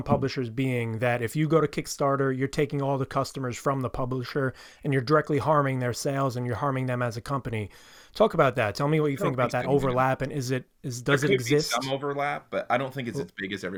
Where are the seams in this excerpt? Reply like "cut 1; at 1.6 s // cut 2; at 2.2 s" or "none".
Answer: none